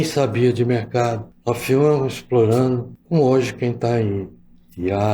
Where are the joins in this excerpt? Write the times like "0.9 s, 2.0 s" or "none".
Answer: 1.3 s, 2.9 s